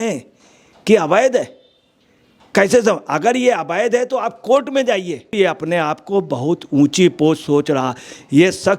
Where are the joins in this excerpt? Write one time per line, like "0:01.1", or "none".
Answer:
0:05.3